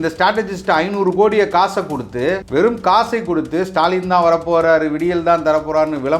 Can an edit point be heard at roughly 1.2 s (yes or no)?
no